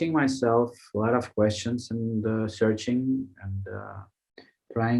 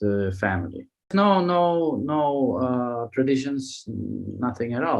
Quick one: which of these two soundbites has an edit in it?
second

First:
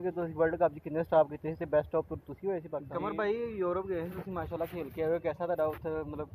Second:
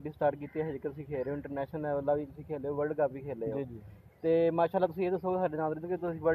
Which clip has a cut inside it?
first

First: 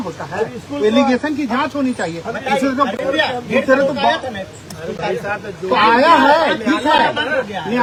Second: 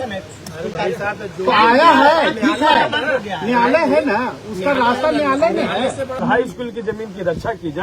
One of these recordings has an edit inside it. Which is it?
second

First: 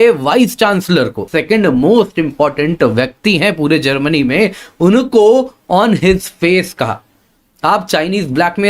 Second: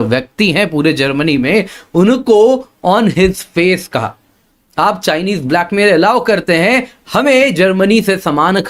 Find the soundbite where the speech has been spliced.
first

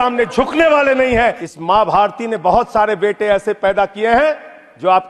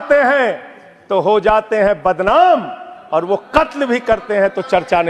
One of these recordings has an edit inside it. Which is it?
first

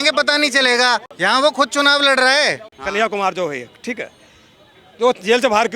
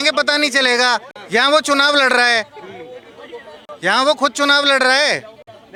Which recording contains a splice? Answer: first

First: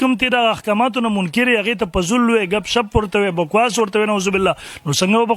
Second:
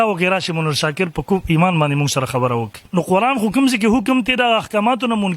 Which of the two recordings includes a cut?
second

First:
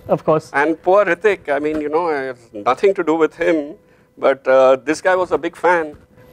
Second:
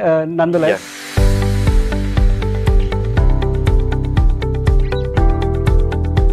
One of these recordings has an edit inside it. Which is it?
second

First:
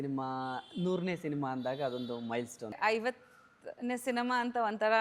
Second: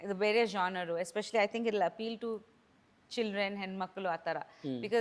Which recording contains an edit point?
first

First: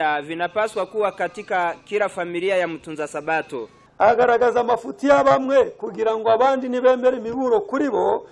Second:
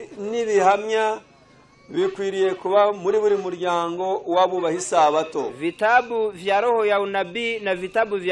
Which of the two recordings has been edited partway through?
first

